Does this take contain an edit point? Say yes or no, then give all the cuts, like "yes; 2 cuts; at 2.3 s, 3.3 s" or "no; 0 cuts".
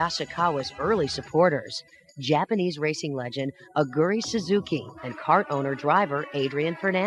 no; 0 cuts